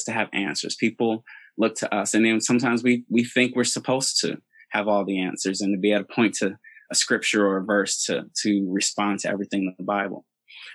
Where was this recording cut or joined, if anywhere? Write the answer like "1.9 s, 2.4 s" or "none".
none